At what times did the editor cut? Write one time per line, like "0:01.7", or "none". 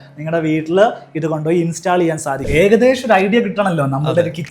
0:02.5